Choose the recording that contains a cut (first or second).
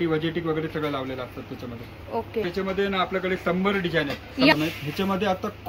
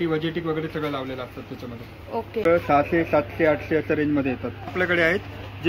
second